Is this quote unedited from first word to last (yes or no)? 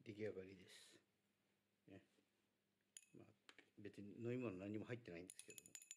yes